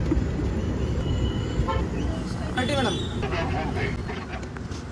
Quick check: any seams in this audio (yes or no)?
yes